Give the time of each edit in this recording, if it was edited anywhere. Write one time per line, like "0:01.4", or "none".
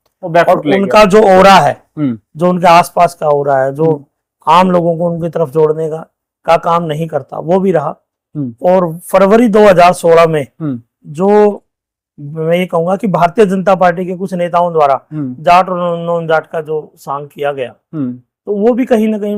none